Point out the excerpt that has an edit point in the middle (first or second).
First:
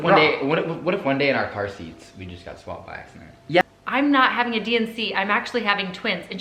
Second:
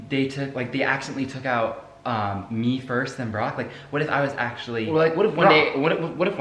first